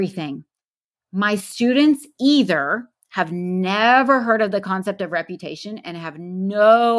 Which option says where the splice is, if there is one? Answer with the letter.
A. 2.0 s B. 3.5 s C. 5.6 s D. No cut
D